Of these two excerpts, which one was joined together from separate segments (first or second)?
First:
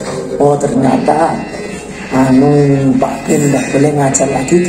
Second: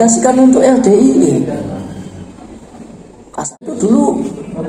second